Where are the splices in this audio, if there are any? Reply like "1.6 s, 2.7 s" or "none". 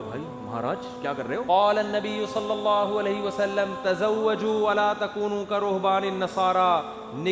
1.4 s